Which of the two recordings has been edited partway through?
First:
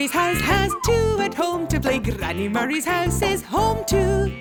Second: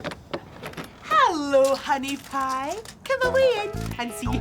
second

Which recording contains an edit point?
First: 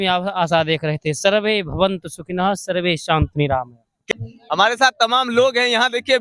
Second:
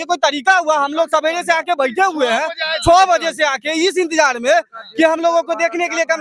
first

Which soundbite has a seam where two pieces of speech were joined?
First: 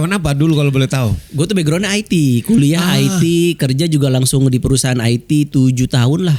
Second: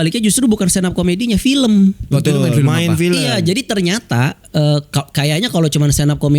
second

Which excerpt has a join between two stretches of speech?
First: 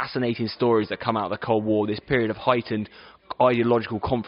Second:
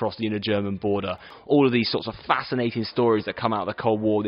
second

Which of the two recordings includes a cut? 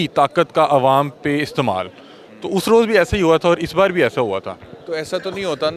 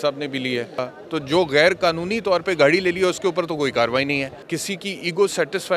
second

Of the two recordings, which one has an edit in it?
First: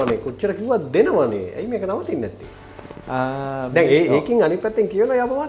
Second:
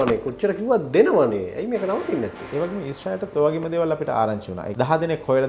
second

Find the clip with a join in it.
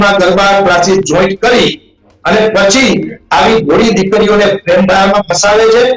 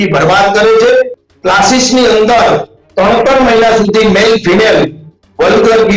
second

